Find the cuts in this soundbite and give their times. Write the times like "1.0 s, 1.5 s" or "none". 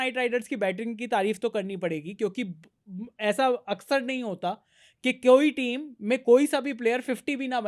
none